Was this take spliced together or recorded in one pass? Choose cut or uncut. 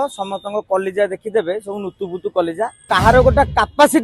cut